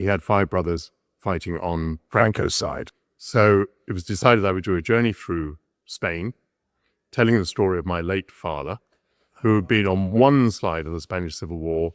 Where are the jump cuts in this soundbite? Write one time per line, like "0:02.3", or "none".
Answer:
0:02.9